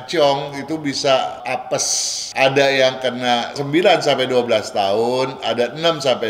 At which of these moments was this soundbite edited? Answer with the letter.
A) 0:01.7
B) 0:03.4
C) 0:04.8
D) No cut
A